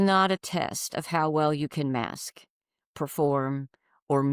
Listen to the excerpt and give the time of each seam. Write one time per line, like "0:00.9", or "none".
none

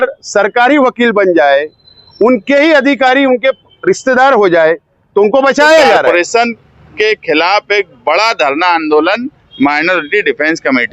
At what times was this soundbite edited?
0:06.1

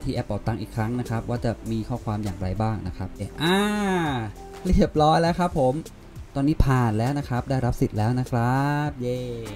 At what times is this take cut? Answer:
0:03.3
0:05.9

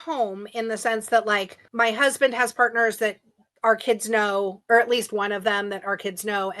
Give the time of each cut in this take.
0:01.6

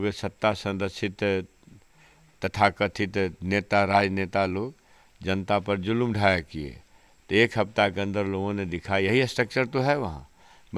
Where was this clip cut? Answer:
none

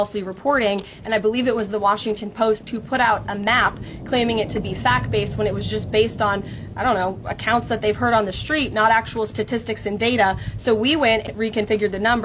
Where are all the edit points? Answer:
0:09.1

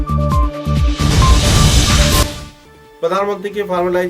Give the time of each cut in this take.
0:02.2

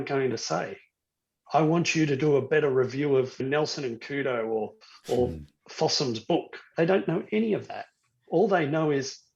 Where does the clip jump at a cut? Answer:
0:03.4
0:06.6

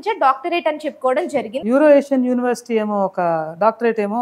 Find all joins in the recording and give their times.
0:01.5

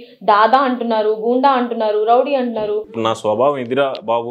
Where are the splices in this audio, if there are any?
0:02.9

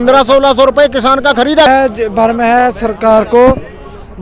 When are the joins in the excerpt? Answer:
0:01.7

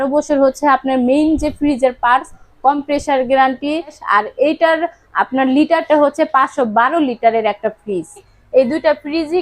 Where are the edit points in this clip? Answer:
0:04.0
0:08.2

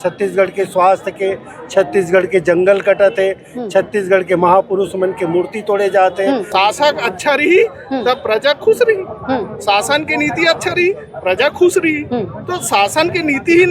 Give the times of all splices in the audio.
0:06.5

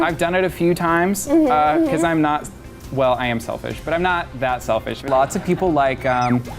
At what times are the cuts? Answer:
0:05.0

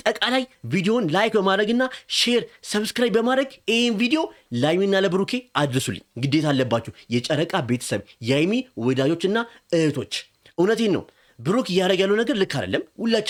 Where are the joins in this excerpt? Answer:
none

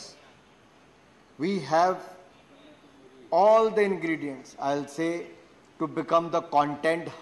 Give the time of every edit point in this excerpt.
none

